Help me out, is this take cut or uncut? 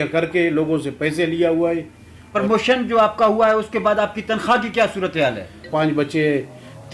cut